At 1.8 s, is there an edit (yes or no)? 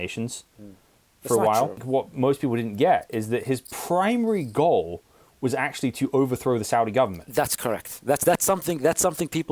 yes